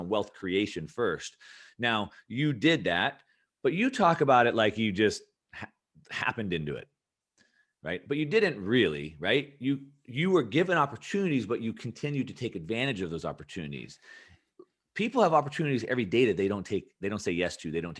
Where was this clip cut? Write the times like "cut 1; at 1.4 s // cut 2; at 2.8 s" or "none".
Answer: none